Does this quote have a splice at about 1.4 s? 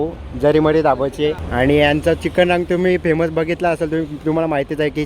yes; 1 cut; at 1.4 s

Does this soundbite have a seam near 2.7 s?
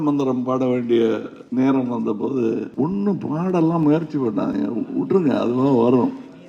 yes; 2 cuts; at 1.3 s, 2.7 s

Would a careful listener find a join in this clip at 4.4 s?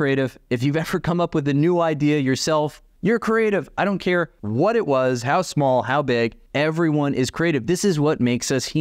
yes; 3 cuts; at 2.8 s, 4.4 s, 6.4 s

